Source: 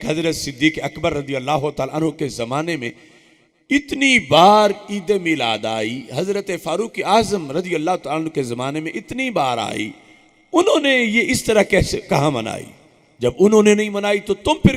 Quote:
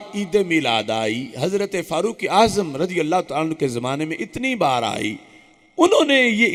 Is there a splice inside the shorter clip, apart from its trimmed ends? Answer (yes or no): no